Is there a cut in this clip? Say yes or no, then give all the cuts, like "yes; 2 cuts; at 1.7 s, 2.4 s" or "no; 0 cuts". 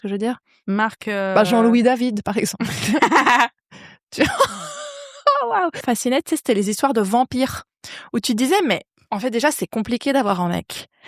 yes; 1 cut; at 5.8 s